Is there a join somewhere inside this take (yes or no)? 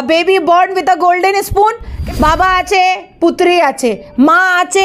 yes